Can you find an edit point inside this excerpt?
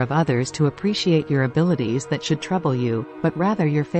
no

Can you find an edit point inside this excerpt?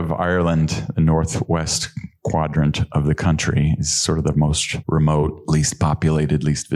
yes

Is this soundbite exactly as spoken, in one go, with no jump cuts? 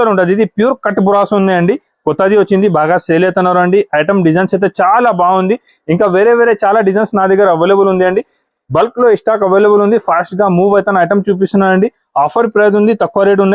yes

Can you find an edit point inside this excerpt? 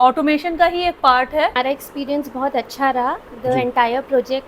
yes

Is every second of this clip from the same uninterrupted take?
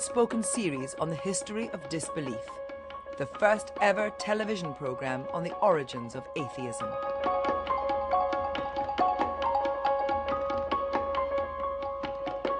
yes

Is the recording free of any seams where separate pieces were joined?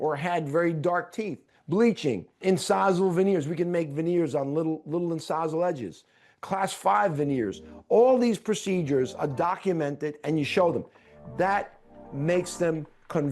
no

